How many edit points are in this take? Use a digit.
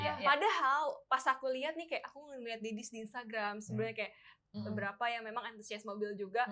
1